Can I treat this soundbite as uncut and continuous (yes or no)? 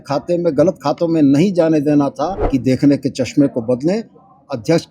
no